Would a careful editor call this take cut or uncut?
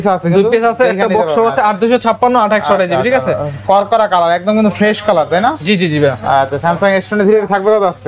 uncut